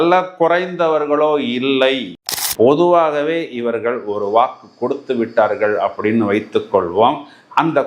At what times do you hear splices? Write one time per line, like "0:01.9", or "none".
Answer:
0:02.2